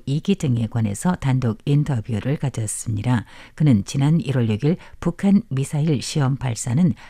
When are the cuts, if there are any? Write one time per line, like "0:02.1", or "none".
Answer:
none